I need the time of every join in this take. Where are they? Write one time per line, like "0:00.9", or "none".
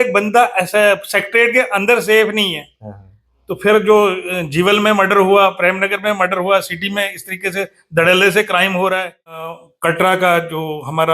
0:09.6